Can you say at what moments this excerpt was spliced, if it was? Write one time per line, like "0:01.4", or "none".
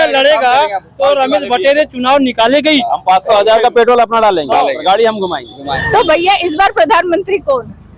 0:05.8